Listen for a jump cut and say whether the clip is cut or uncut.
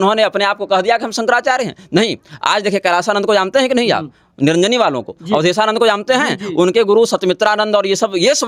uncut